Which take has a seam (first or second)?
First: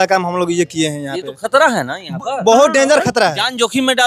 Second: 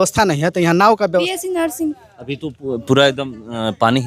second